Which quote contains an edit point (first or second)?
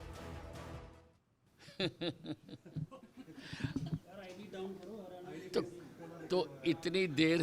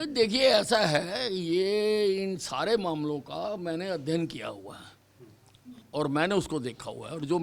first